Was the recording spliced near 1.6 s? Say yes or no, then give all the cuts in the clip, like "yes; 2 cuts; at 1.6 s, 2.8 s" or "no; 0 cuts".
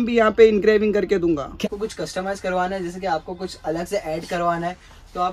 yes; 1 cut; at 1.6 s